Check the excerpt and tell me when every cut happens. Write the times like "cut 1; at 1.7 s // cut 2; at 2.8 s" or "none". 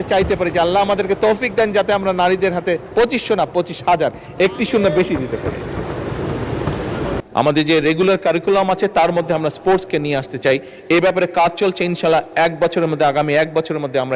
cut 1; at 7.2 s